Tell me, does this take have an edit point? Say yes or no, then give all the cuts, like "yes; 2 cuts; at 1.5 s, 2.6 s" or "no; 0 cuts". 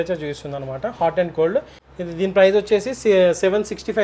yes; 1 cut; at 1.8 s